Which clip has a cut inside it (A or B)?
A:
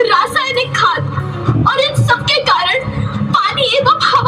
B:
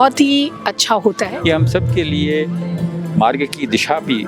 B